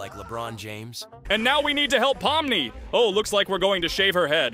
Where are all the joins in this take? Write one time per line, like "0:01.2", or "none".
0:01.2